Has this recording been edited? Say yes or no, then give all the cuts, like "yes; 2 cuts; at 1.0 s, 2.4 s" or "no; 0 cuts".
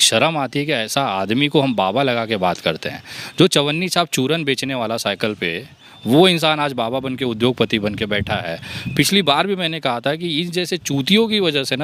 no; 0 cuts